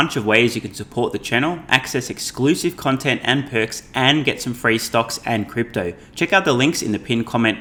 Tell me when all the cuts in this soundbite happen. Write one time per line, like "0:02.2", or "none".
none